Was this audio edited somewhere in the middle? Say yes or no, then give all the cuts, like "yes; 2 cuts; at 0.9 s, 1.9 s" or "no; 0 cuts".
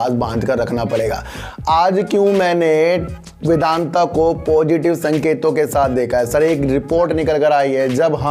no; 0 cuts